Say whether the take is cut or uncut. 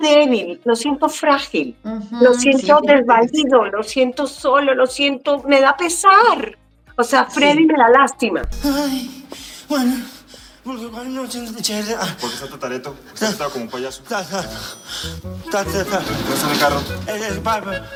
uncut